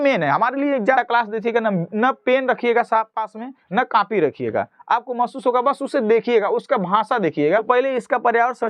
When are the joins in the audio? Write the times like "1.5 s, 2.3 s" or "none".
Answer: 1.0 s, 7.6 s